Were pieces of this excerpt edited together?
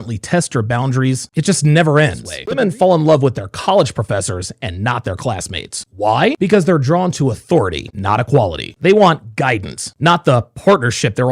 yes; 1 cut; at 2.6 s

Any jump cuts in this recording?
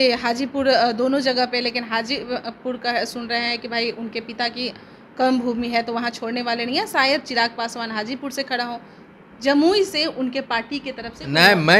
no; 0 cuts

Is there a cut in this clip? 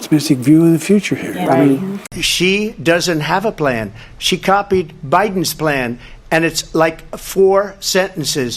yes; 1 cut; at 2.2 s

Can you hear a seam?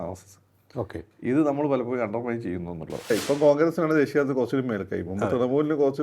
yes; 1 cut; at 3.1 s

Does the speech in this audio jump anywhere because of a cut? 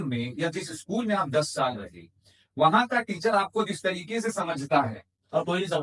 no; 0 cuts

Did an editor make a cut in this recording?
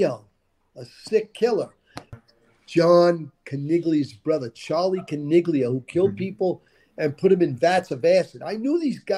yes; 1 cut; at 2.2 s

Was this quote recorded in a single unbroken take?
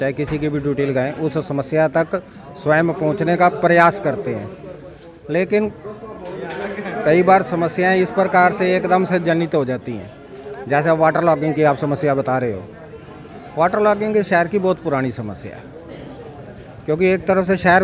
yes; 0 cuts

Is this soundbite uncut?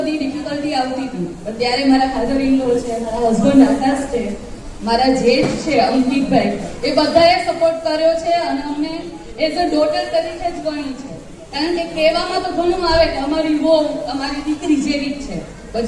yes; 0 cuts

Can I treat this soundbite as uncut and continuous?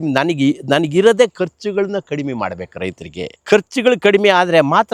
yes; 0 cuts

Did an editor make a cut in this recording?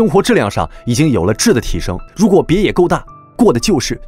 yes; 1 cut; at 2.0 s

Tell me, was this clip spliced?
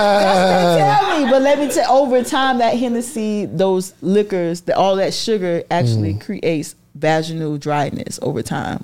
no; 0 cuts

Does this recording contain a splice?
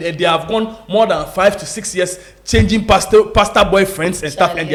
no; 0 cuts

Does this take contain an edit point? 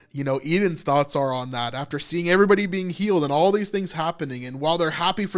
no; 0 cuts

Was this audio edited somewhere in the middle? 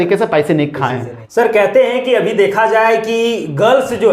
yes; 1 cut; at 1.1 s

